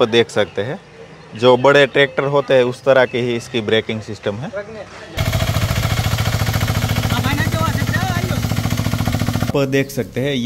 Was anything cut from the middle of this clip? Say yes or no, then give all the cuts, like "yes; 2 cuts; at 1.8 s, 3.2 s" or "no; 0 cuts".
yes; 2 cuts; at 5.2 s, 9.5 s